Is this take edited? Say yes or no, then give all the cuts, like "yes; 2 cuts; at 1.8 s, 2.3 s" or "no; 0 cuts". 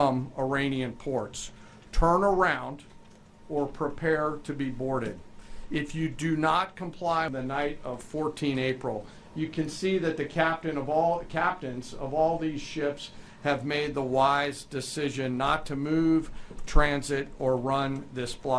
yes; 1 cut; at 7.3 s